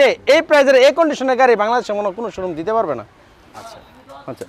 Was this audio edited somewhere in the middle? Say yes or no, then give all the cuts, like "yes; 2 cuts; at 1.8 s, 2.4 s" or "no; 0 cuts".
no; 0 cuts